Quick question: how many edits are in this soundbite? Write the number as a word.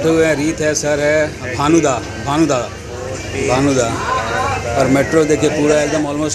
zero